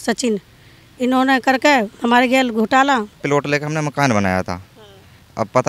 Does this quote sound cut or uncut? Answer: cut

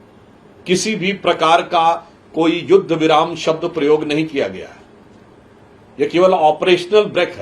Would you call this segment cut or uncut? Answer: uncut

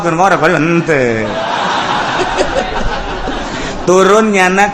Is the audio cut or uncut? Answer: cut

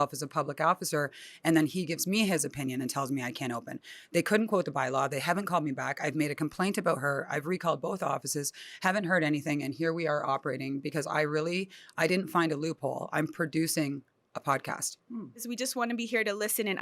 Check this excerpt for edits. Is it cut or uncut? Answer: cut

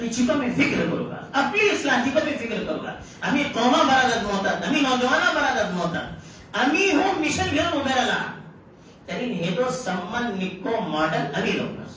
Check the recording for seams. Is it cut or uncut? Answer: uncut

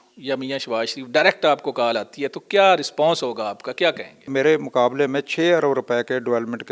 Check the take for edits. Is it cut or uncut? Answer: cut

